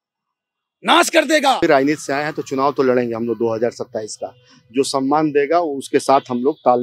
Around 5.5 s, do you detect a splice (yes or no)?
no